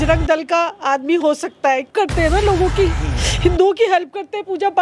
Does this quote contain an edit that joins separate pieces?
yes; 1 cut; at 1.9 s

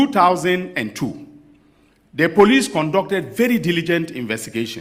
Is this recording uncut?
yes; 0 cuts

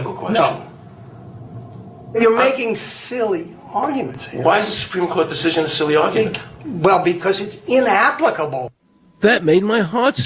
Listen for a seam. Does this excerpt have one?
no; 0 cuts

